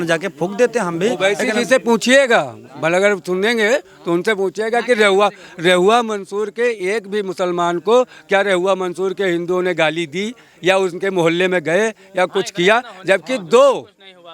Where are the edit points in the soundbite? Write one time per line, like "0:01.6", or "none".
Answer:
none